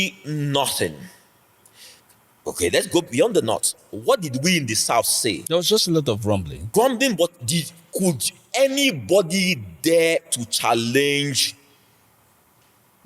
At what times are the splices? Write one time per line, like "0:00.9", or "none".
0:05.4
0:06.6